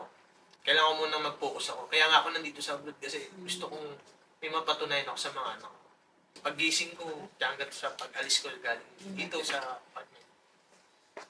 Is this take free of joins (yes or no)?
no